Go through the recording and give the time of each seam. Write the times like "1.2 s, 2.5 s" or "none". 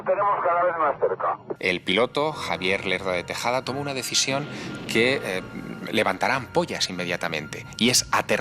1.5 s